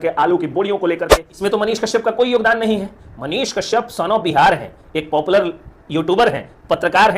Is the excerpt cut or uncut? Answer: cut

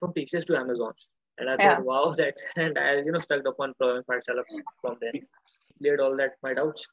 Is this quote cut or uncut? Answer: cut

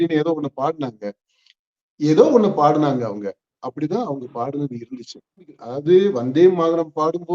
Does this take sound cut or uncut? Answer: cut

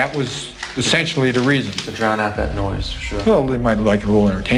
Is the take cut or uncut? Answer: uncut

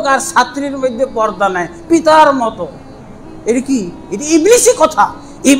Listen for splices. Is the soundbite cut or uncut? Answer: uncut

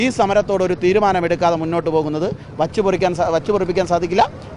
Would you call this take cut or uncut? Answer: uncut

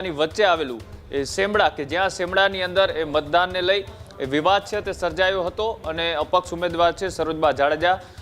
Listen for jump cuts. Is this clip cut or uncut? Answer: uncut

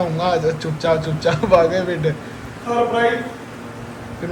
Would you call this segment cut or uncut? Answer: uncut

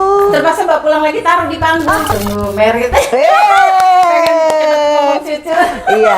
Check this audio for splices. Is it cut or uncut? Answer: cut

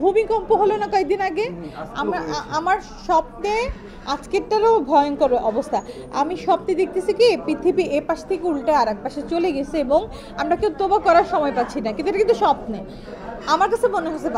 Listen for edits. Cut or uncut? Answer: uncut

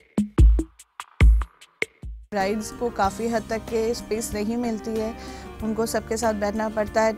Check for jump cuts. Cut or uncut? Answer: cut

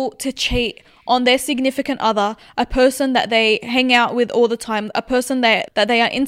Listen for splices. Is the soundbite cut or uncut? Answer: uncut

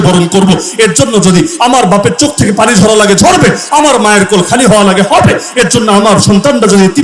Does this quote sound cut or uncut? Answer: uncut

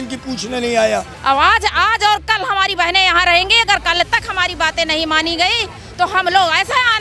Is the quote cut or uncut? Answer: cut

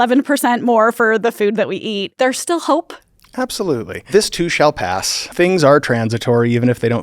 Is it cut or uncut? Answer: cut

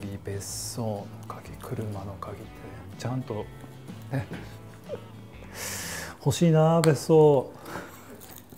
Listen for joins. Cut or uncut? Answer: uncut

